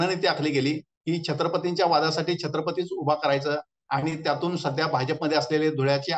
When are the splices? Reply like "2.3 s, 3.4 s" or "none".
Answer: 0.9 s, 3.7 s